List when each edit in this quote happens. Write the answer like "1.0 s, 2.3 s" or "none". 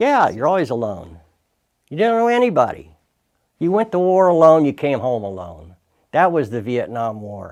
none